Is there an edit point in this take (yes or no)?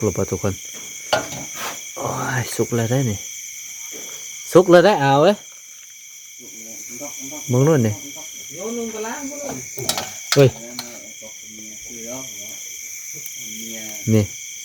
no